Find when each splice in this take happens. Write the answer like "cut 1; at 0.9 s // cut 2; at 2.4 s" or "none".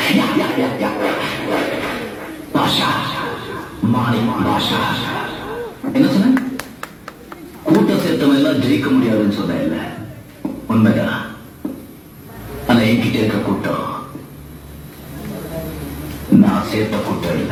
none